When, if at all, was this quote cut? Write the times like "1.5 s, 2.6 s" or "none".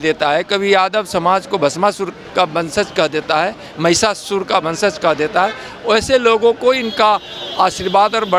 none